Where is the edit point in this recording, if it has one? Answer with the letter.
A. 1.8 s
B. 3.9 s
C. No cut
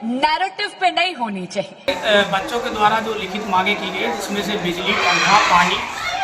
A